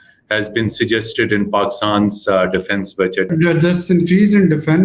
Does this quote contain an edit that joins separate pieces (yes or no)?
yes